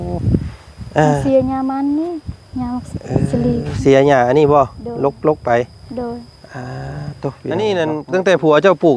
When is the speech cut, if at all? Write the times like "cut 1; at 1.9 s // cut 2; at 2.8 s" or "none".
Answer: cut 1; at 7.4 s

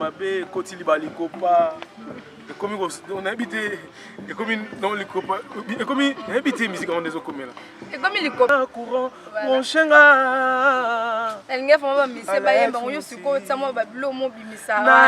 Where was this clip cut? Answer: cut 1; at 8.5 s

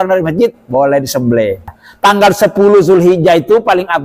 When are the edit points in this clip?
cut 1; at 1.8 s

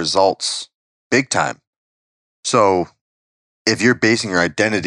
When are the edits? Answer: none

